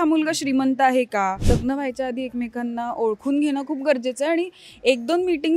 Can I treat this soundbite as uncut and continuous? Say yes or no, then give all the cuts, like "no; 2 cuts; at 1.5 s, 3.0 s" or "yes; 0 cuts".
no; 1 cut; at 1.4 s